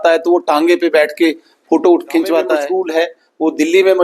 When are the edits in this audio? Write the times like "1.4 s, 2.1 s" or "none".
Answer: 2.6 s